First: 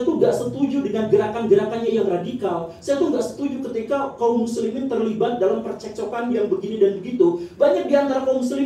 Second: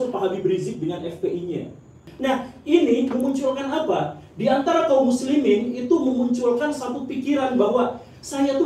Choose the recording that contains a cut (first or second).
second